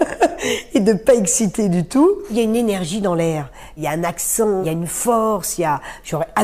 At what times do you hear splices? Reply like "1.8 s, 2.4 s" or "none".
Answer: 2.3 s, 3.7 s, 4.6 s